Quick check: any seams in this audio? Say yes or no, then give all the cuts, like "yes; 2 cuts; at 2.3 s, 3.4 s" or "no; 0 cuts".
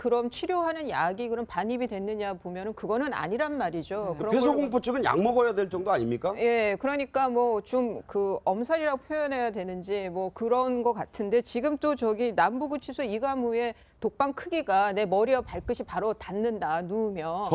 no; 0 cuts